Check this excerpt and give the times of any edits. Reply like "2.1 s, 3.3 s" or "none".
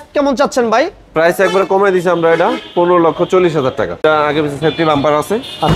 4.0 s